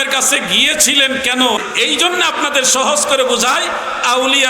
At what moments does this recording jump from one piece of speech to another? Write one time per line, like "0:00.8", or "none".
0:01.6